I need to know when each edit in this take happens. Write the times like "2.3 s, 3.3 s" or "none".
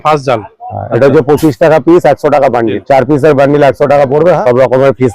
2.8 s, 4.4 s

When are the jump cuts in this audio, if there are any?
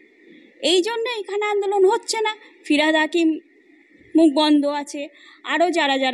none

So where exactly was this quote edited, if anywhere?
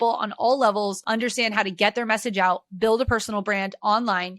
1.0 s

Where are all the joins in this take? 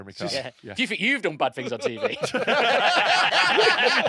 none

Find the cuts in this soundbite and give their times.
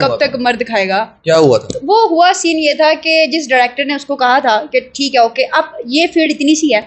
none

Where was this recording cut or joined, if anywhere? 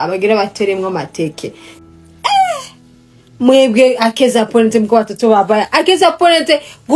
1.7 s

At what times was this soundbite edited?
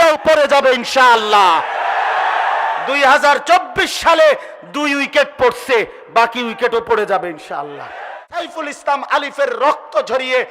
8.5 s

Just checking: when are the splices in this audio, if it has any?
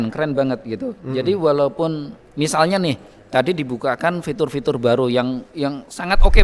none

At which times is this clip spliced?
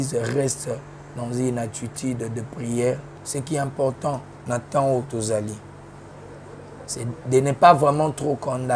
3.2 s

